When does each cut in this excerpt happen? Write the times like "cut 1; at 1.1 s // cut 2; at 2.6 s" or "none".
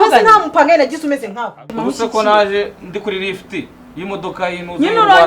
cut 1; at 1.7 s

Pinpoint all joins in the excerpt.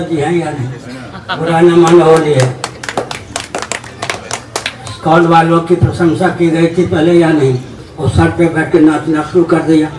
none

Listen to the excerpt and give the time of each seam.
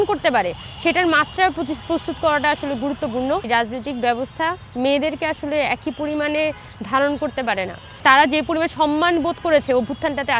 cut 1; at 3.5 s // cut 2; at 8.0 s

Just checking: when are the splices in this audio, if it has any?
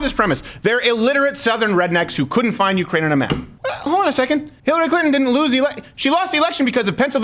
cut 1; at 3.8 s // cut 2; at 4.5 s

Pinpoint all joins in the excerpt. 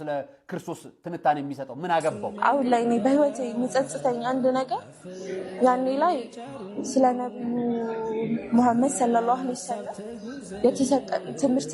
cut 1; at 2.3 s

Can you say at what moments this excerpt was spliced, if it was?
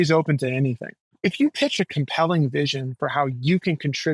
cut 1; at 1.1 s

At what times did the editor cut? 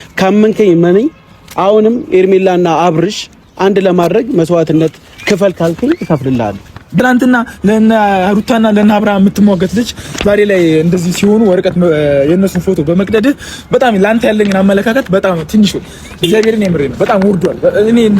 cut 1; at 6.9 s

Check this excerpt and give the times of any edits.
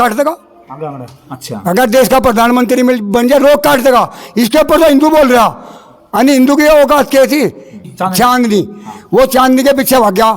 cut 1; at 7.7 s

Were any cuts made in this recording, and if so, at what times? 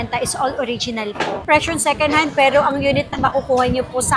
cut 1; at 1.4 s

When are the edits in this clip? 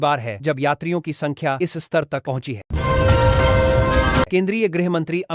cut 1; at 2.7 s // cut 2; at 4.3 s

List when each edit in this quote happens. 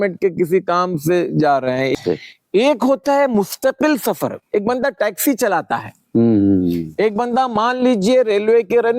cut 1; at 1.9 s

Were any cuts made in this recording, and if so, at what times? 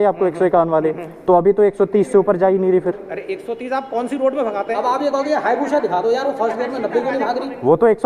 cut 1; at 4.6 s

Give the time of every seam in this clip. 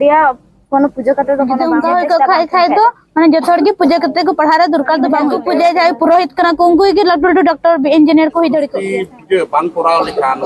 cut 1; at 1.6 s // cut 2; at 5.4 s // cut 3; at 8.8 s

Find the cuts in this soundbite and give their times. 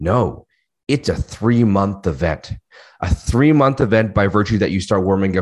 none

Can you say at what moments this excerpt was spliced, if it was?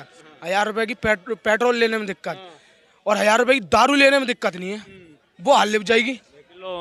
none

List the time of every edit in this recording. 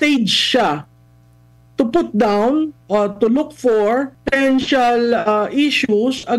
cut 1; at 4.2 s

